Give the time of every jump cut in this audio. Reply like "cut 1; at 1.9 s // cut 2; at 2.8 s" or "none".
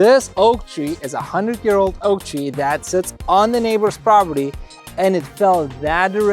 none

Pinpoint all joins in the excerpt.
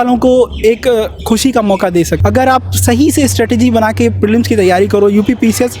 cut 1; at 2.1 s

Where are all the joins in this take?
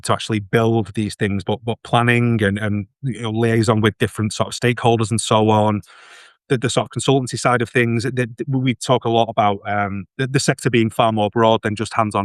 none

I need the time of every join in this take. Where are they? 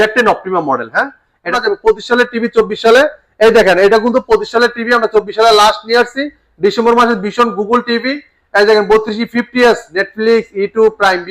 cut 1; at 1.5 s

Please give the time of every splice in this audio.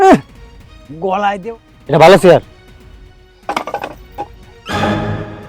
cut 1; at 1.4 s

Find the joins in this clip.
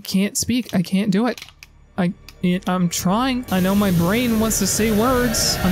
none

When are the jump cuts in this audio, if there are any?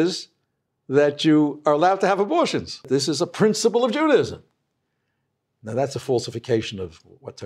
cut 1; at 2.9 s

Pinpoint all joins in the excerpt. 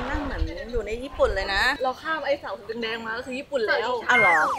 cut 1; at 1.7 s

